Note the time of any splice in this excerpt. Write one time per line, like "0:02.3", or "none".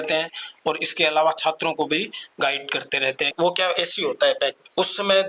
0:03.3